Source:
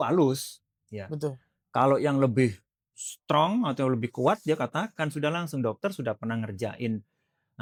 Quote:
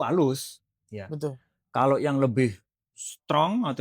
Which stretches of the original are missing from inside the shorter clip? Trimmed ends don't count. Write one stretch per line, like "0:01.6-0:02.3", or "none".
none

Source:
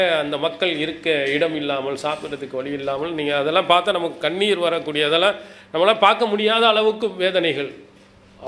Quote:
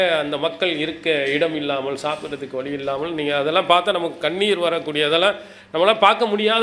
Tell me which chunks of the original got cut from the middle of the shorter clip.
none

